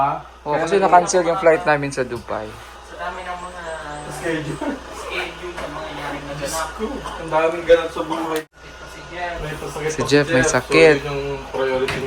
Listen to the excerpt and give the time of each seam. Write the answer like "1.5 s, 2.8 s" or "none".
8.4 s

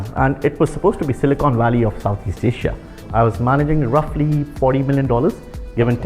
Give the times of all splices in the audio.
3.0 s

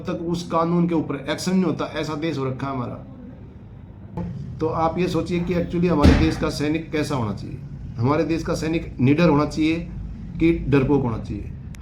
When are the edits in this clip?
4.2 s

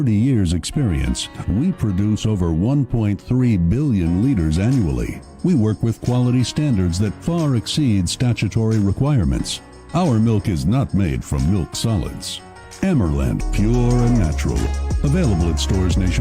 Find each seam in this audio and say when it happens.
13.4 s

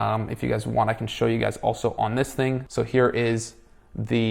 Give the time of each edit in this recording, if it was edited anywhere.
2.6 s

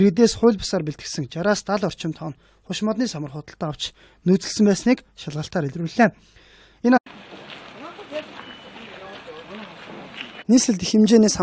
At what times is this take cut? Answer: none

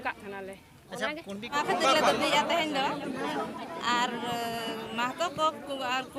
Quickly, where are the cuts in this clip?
1.6 s

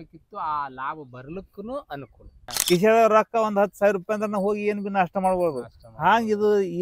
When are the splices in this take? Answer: 2.5 s

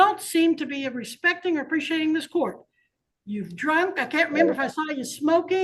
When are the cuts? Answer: none

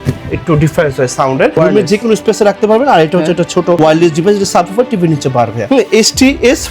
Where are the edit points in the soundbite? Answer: 1.6 s, 3.8 s, 5.6 s

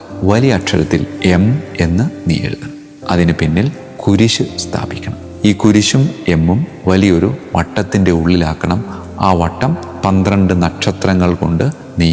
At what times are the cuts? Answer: none

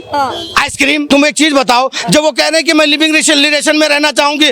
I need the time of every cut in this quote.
1.1 s

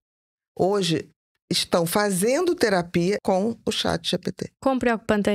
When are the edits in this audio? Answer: 3.2 s, 4.5 s

